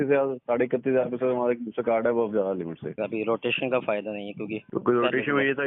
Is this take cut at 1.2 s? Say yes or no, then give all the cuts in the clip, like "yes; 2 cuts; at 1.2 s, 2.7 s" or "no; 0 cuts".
no; 2 cuts; at 2.9 s, 4.6 s